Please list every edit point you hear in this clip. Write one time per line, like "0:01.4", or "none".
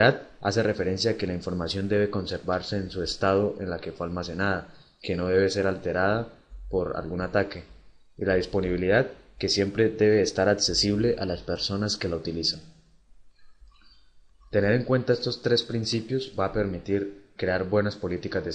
0:05.4